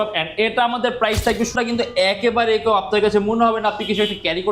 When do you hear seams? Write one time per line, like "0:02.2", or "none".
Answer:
0:01.5